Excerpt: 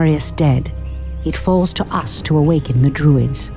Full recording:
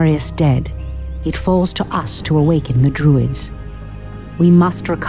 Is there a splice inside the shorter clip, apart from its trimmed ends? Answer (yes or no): no